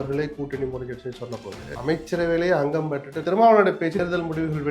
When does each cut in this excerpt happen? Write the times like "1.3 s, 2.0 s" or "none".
1.7 s, 3.2 s, 4.0 s